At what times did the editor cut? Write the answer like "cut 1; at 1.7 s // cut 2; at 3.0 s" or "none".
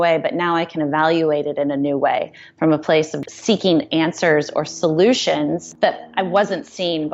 cut 1; at 3.1 s // cut 2; at 5.7 s